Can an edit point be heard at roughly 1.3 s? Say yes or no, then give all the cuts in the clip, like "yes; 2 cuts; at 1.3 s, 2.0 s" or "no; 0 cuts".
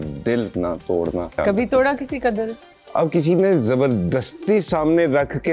yes; 1 cut; at 1.3 s